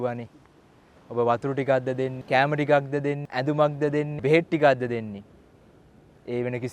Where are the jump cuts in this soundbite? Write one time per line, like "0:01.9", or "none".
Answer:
0:02.2
0:03.2
0:04.1